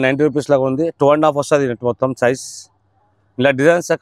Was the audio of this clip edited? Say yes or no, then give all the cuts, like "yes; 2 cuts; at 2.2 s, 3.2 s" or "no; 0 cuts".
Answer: no; 0 cuts